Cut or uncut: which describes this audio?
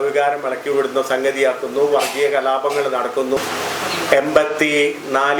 cut